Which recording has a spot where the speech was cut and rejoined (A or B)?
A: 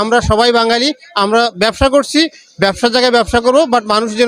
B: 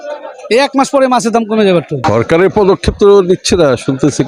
B